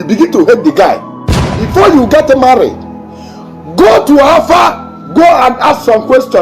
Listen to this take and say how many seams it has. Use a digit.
1